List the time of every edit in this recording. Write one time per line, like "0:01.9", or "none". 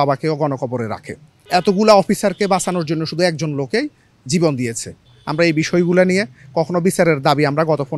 0:01.4
0:05.2